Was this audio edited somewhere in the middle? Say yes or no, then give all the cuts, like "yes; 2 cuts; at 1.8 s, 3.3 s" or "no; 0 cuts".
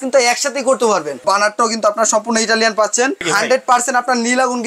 yes; 2 cuts; at 1.2 s, 3.3 s